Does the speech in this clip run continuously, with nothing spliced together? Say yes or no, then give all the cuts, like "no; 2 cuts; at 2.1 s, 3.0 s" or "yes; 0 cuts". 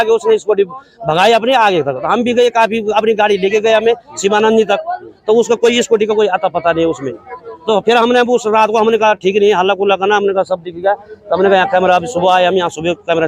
yes; 0 cuts